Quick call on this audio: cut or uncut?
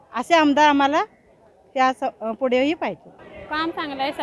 cut